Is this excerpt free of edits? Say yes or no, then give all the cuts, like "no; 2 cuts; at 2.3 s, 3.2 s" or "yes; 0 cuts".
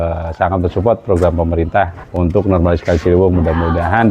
no; 1 cut; at 2.0 s